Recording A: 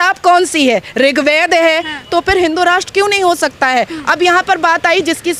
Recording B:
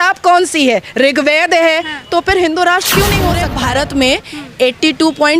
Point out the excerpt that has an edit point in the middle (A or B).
B